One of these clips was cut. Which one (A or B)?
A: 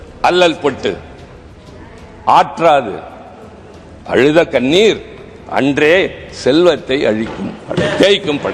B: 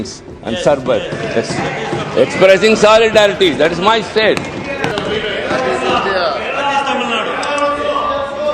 B